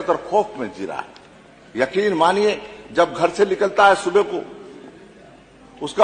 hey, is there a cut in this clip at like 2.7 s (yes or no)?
no